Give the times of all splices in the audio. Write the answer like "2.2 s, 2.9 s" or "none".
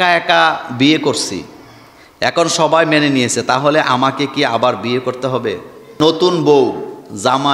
5.8 s